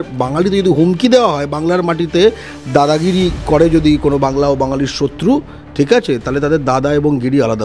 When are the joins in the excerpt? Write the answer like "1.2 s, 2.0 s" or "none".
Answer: none